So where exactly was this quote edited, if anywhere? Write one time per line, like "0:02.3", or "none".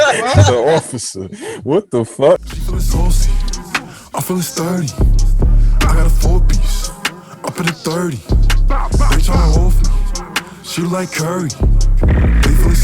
0:02.4

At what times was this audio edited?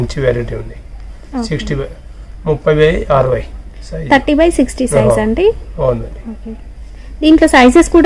none

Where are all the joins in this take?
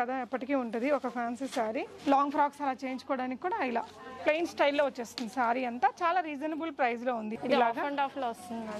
0:01.9
0:07.3

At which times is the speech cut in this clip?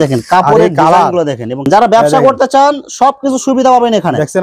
0:01.6

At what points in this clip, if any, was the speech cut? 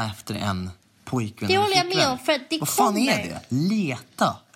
none

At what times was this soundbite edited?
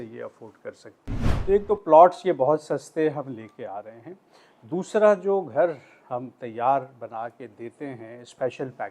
0:01.3

